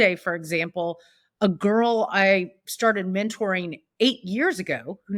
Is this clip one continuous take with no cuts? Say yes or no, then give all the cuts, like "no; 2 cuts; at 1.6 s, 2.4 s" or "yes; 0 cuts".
yes; 0 cuts